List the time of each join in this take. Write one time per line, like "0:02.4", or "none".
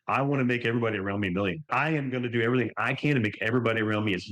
0:01.7